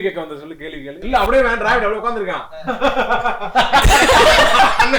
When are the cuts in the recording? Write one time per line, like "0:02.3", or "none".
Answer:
0:01.0